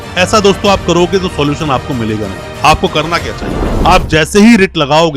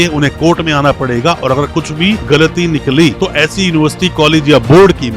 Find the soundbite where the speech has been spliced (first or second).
first